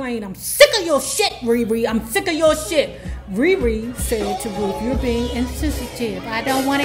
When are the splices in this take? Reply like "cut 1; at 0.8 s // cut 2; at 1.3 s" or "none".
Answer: none